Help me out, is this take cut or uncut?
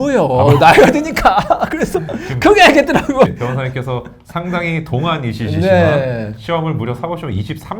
cut